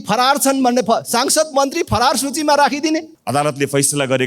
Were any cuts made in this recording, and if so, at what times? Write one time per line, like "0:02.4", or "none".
0:03.1